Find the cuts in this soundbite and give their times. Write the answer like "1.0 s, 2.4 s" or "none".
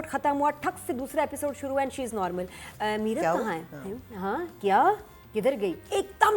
none

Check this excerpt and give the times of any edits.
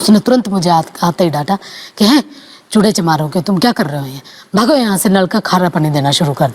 none

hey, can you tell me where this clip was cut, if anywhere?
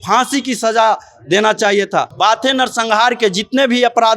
2.1 s

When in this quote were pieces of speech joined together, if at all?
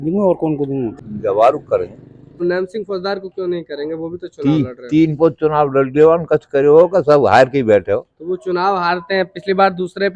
0.9 s, 2.4 s

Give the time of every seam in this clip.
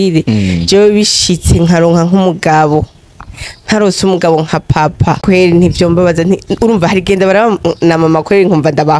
5.2 s

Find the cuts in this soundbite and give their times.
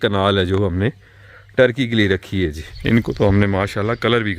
2.7 s

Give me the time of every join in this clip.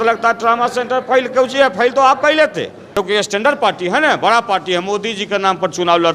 2.9 s

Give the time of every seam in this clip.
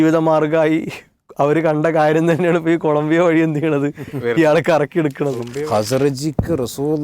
5.5 s

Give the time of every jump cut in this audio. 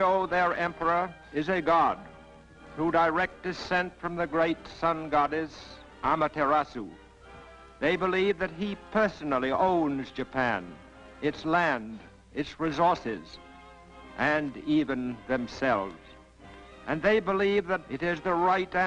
14.6 s

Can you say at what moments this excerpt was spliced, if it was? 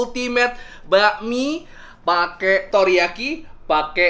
none

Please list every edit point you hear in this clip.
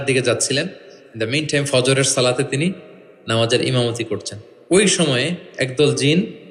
none

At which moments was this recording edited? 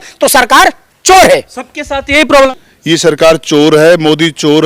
2.5 s

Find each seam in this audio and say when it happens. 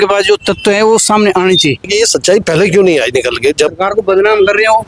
1.9 s, 3.8 s

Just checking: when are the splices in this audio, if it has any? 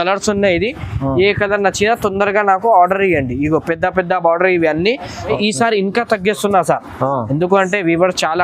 5.4 s

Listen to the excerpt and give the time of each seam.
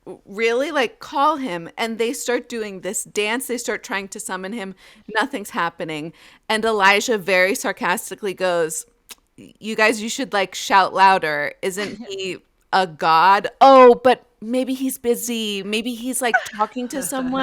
none

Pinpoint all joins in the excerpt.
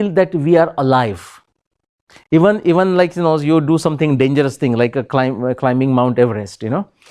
none

